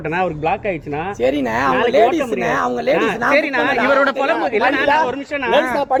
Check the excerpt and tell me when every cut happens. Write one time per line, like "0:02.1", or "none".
none